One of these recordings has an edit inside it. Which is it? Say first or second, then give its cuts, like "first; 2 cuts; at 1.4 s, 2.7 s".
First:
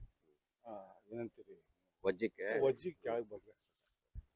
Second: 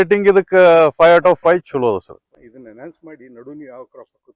second; 1 cut; at 2.2 s